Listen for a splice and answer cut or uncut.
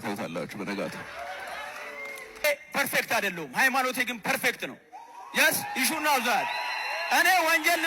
uncut